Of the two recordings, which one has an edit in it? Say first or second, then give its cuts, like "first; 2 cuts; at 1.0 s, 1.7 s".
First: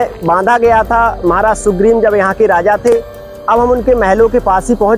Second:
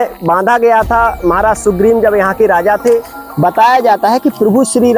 second; 1 cut; at 3.2 s